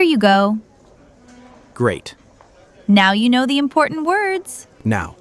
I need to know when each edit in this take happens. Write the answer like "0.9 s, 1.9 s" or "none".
none